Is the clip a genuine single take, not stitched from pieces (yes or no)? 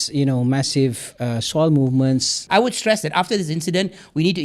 no